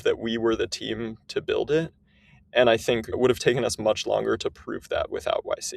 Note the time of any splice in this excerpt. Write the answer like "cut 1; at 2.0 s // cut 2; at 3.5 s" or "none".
cut 1; at 3.1 s